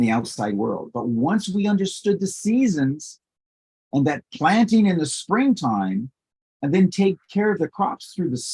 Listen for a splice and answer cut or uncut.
uncut